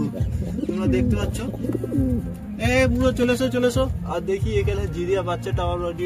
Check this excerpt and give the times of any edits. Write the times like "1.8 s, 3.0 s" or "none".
none